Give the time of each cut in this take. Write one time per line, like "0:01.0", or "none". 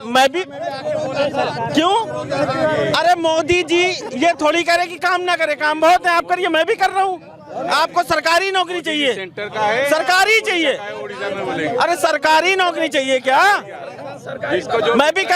none